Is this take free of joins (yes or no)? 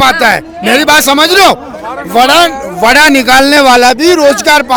yes